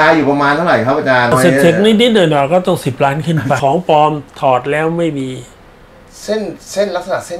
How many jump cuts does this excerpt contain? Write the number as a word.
two